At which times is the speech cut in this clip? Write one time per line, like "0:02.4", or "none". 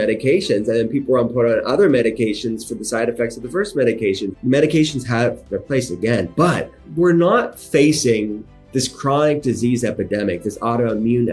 0:04.3
0:06.8